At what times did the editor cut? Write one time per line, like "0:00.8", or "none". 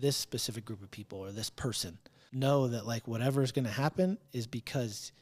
0:02.1

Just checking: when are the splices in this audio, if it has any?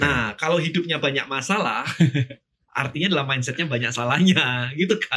none

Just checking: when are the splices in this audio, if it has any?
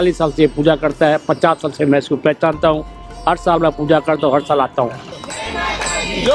0:05.2

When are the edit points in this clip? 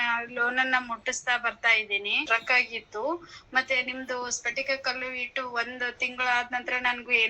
0:02.2

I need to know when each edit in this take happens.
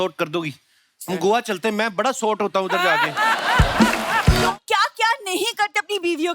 0:04.5

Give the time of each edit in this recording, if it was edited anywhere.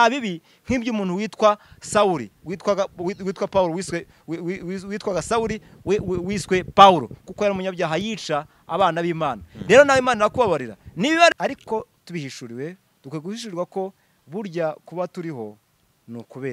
0:11.3

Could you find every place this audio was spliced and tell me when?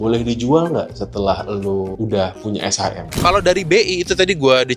0:01.9
0:03.1

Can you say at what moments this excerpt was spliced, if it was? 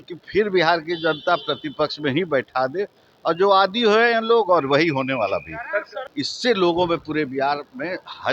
0:06.0

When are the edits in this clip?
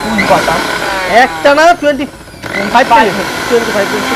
none

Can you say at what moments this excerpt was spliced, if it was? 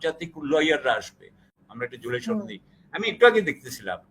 0:01.4

